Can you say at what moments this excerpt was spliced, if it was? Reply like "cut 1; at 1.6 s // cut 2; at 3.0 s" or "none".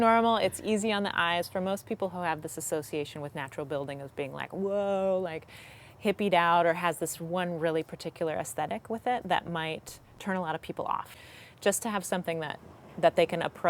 cut 1; at 11.2 s